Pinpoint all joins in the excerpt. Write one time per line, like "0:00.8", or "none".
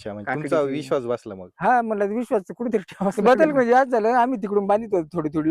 0:03.2